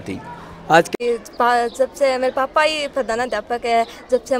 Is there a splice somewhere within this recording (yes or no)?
yes